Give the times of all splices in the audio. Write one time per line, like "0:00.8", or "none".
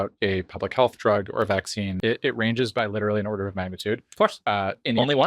0:01.9